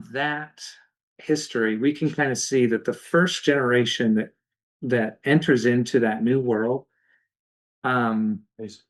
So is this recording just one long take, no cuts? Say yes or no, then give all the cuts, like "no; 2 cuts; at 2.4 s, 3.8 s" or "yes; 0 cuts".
yes; 0 cuts